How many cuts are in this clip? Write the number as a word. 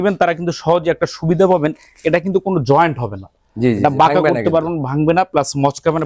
zero